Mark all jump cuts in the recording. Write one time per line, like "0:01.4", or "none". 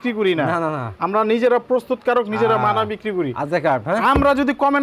none